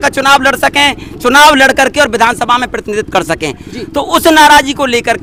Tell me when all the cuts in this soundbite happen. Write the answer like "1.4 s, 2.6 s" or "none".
none